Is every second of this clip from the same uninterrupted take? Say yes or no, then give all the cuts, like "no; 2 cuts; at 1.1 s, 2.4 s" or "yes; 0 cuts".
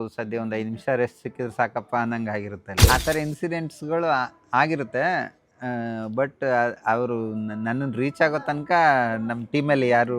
no; 1 cut; at 2.8 s